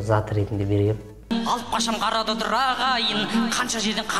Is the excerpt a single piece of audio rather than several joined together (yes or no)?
no